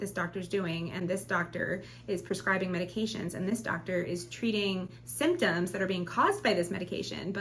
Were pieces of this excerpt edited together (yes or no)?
no